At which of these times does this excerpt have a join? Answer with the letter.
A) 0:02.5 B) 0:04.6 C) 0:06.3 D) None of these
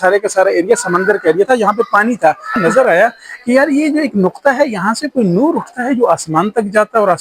A